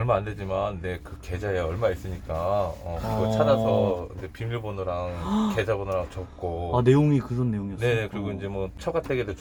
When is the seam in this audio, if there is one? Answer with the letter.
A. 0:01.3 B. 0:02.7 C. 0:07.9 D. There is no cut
D